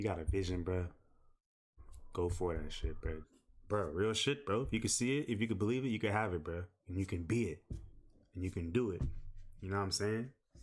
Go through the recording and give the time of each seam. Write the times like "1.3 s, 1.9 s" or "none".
3.3 s